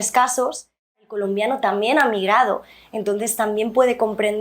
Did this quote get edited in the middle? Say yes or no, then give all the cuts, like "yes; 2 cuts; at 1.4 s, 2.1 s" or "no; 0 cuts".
yes; 1 cut; at 1.1 s